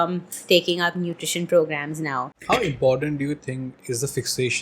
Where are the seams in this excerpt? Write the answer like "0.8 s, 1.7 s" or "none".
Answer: 2.3 s

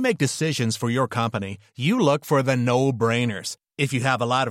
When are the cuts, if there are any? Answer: none

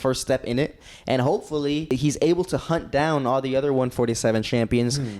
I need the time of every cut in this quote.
0.9 s, 1.9 s

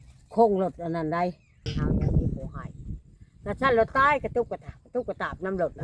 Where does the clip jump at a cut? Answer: 1.7 s

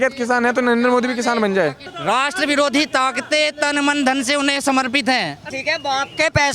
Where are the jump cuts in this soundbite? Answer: 1.9 s, 5.5 s

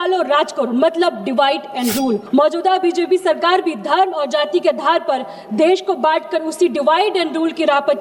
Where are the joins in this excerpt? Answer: 2.2 s

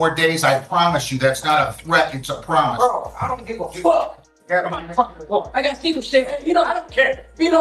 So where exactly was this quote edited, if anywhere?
4.3 s

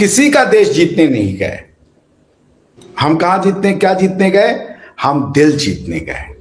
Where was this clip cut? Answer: none

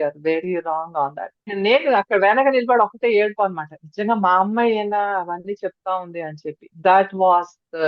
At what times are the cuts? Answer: 1.5 s

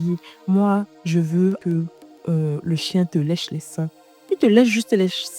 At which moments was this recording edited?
1.6 s

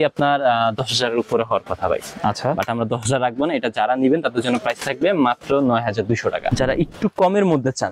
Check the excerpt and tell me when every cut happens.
6.5 s

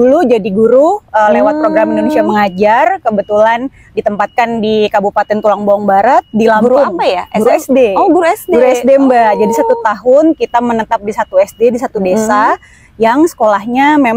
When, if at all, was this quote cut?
none

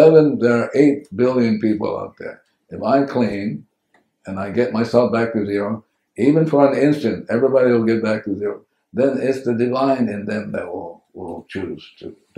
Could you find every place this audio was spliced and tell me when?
none

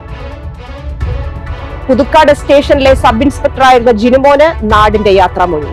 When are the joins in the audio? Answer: 1.3 s

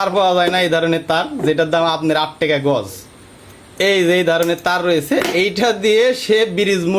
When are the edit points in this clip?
none

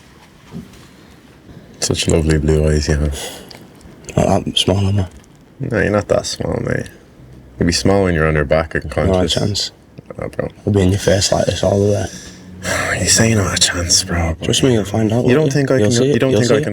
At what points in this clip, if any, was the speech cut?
1.5 s

